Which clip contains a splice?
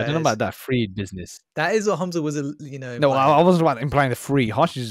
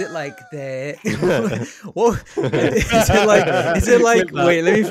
first; 1 cut; at 1.0 s

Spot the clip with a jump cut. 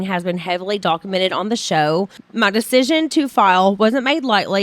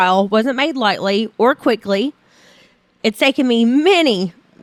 first; 1 cut; at 2.2 s

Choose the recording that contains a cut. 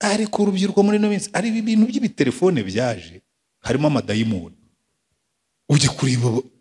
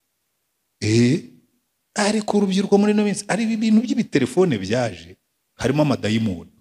first; 1 cut; at 5.7 s

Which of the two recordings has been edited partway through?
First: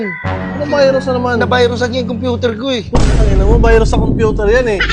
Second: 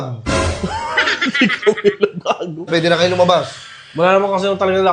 second; 1 cut; at 2.7 s

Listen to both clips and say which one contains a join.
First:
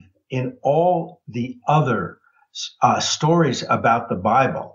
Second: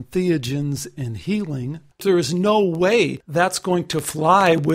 second; 2 cuts; at 2.0 s, 3.2 s

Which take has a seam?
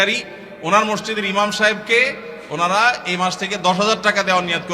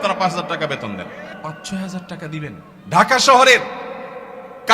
second; 2 cuts; at 1.3 s, 2.7 s

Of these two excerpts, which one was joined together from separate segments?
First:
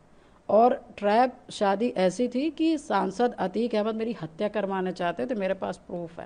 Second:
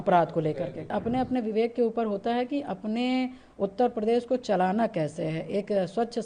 second; 1 cut; at 0.9 s

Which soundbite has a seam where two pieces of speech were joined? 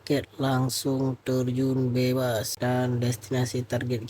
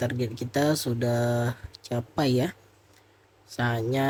first; 1 cut; at 2.5 s

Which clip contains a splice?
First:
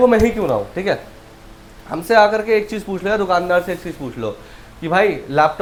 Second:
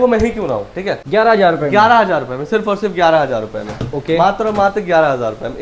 second; 1 cut; at 1.0 s

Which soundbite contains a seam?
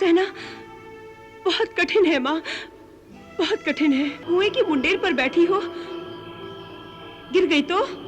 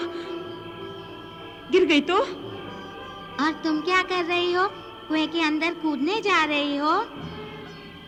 first; 1 cut; at 4.2 s

